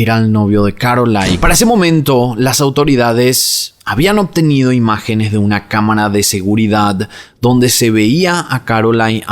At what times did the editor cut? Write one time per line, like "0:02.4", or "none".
0:01.4